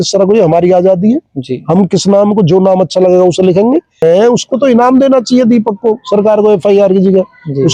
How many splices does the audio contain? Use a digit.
1